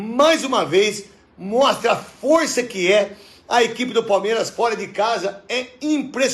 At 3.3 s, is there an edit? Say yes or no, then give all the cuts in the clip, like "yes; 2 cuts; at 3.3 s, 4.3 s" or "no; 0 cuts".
no; 0 cuts